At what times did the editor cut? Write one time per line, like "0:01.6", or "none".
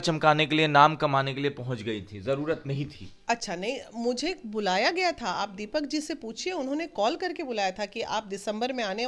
none

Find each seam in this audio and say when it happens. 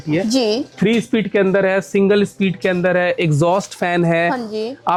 none

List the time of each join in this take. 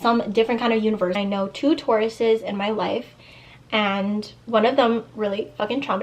0:01.1
0:04.4

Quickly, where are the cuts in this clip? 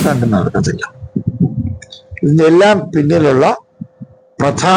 none

